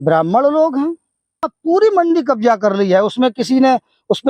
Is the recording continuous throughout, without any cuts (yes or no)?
no